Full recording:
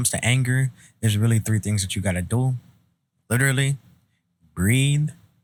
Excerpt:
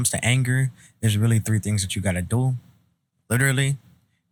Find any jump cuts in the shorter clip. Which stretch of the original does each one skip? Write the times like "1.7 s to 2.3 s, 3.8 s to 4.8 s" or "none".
none